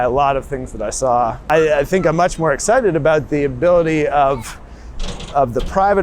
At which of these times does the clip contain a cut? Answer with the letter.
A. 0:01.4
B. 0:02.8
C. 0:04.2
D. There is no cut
A